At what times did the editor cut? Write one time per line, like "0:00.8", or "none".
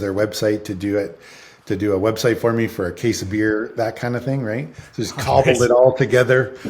none